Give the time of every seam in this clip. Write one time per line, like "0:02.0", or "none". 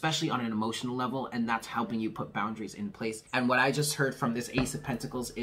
0:03.2